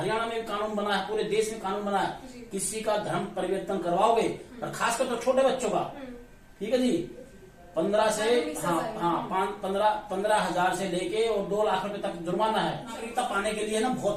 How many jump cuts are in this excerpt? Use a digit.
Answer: 1